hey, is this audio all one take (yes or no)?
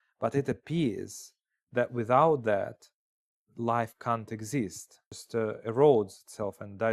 no